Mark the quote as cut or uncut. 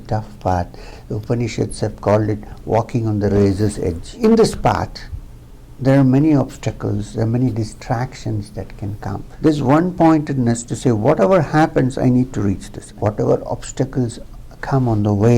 cut